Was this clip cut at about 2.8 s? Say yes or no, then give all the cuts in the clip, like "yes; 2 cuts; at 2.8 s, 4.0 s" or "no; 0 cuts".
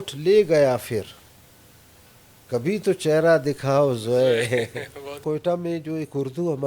no; 1 cut; at 5.1 s